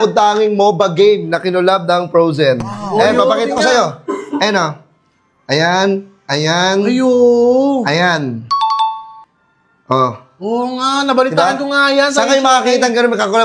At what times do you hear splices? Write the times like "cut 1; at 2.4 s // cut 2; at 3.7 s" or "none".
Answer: none

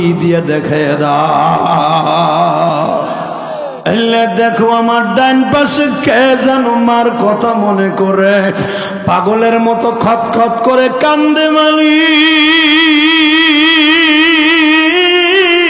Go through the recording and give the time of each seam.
cut 1; at 3.7 s

